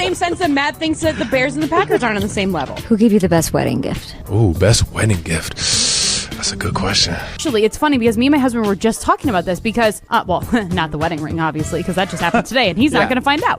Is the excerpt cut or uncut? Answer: uncut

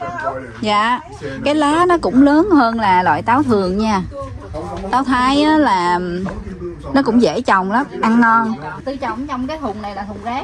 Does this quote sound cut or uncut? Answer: uncut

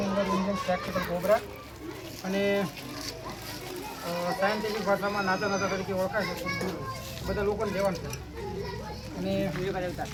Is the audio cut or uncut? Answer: uncut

